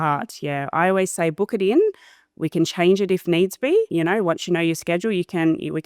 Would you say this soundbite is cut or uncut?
cut